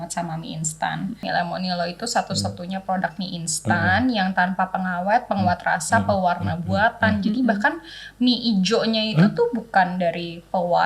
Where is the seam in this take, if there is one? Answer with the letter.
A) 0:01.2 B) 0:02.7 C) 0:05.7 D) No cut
A